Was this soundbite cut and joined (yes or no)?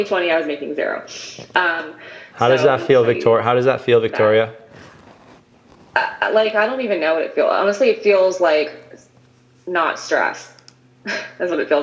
no